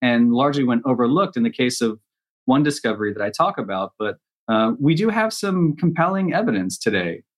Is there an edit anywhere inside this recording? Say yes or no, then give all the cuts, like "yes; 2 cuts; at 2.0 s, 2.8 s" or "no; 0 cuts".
no; 0 cuts